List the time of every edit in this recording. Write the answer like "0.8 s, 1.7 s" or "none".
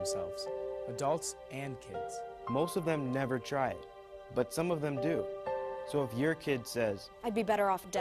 6.1 s